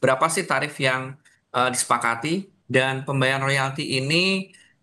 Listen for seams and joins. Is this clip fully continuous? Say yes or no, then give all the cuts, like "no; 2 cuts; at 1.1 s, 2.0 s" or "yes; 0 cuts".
no; 1 cut; at 2.5 s